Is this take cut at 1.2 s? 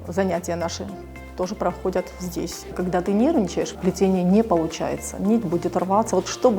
no; 2 cuts; at 2.8 s, 3.7 s

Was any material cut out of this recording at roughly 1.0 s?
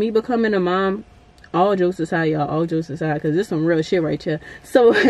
no; 0 cuts

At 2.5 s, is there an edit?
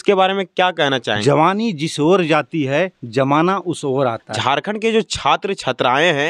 no; 2 cuts; at 1.2 s, 4.3 s

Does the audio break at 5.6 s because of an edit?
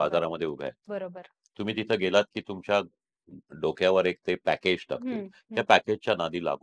no; 0 cuts

